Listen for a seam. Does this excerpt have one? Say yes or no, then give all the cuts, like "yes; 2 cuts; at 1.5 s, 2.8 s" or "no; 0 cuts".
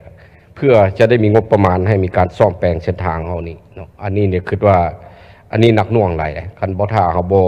no; 0 cuts